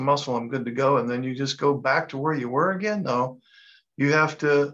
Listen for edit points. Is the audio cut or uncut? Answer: uncut